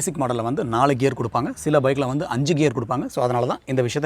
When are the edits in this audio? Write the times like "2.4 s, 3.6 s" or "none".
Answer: 3.1 s